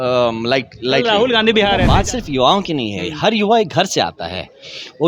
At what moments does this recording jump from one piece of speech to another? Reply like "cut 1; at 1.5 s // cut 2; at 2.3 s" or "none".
cut 1; at 1.8 s